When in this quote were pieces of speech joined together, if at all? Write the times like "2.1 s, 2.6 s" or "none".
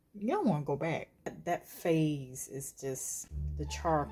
1.3 s